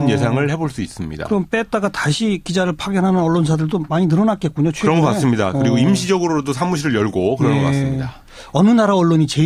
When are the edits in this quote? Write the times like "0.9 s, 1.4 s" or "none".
none